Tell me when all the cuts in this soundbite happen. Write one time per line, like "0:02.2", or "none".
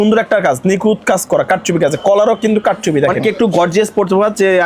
0:03.2